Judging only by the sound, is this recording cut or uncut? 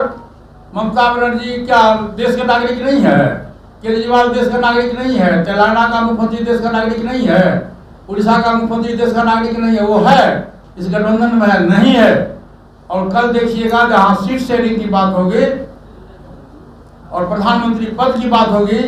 uncut